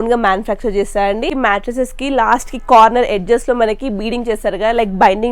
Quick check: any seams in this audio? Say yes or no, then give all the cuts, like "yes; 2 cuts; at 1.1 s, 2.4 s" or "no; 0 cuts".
yes; 1 cut; at 1.3 s